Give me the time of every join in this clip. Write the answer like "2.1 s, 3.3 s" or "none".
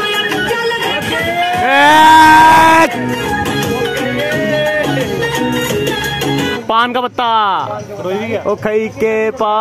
0.9 s, 3.2 s, 6.6 s, 8.4 s